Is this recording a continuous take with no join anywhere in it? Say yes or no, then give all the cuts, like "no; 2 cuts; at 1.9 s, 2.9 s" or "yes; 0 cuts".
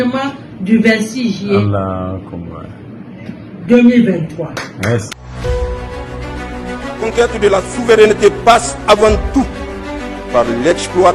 no; 1 cut; at 5.2 s